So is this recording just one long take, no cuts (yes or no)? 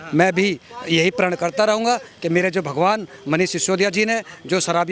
yes